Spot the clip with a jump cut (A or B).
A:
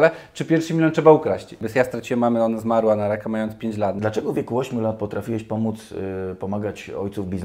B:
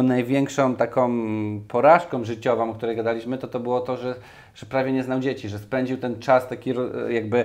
A